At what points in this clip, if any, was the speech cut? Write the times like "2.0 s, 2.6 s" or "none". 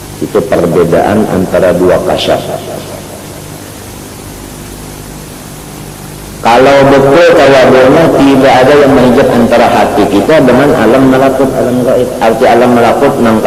none